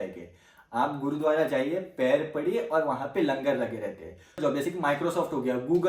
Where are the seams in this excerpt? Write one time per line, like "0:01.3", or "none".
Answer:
0:04.4

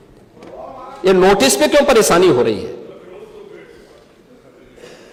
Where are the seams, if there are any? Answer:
none

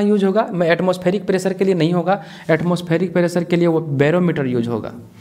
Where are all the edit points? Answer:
none

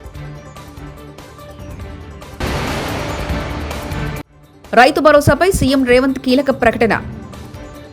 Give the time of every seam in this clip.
0:01.1

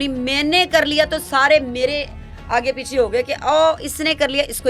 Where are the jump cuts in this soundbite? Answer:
none

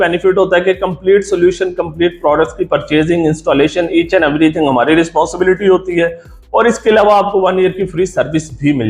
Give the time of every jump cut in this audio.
none

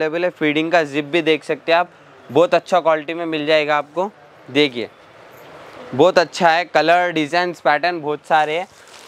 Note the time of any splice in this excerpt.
none

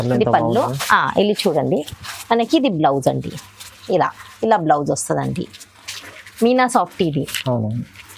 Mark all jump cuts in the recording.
none

